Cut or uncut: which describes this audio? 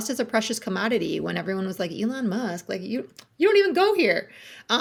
uncut